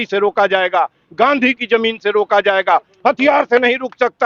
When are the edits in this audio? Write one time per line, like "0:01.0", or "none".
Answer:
none